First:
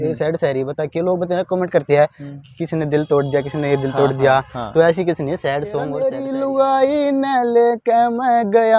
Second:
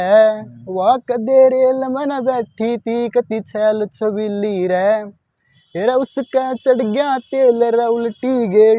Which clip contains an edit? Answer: first; 1 cut; at 6.2 s

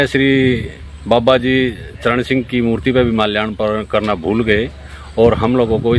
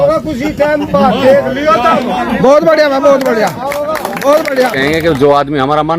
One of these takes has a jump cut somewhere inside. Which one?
second; 1 cut; at 4.8 s

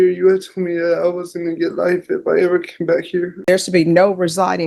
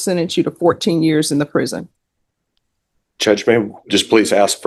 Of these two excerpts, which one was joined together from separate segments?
first; 1 cut; at 3.3 s

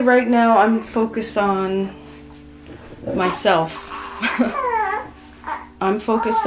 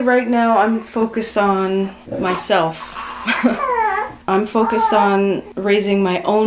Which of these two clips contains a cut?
second; 3 cuts; at 2.0 s, 4.2 s, 5.5 s

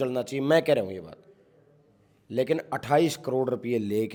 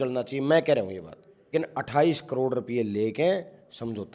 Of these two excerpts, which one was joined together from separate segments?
second; 1 cut; at 1.5 s

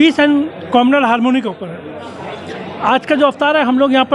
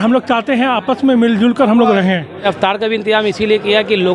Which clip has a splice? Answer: second; 1 cut; at 2.4 s

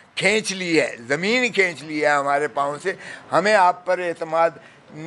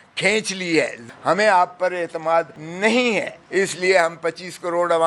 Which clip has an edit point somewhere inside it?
second; 3 cuts; at 1.0 s, 2.6 s, 3.4 s

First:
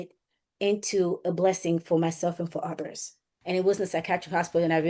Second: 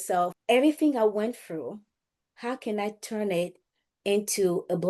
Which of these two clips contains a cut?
first; 1 cut; at 3.3 s

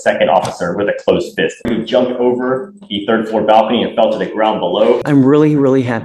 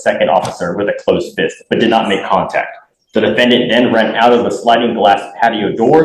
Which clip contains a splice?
first; 2 cuts; at 1.7 s, 5.0 s

